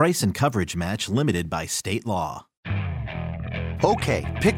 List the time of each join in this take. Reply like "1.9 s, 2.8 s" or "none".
2.5 s